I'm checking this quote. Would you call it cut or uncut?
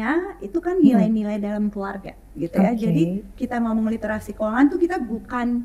uncut